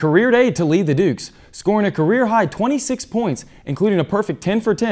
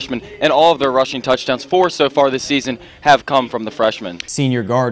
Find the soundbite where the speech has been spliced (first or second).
second